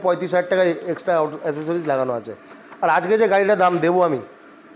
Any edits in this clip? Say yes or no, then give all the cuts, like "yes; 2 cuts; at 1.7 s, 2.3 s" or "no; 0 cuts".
no; 0 cuts